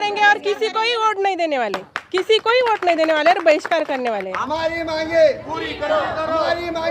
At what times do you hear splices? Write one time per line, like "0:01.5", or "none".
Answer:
0:04.3